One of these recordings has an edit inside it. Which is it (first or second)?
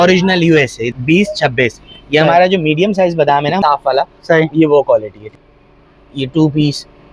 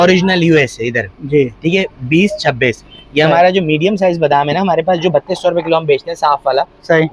first